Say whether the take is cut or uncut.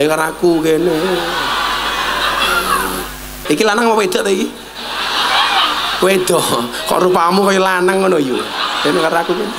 cut